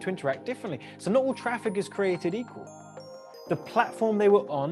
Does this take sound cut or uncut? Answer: uncut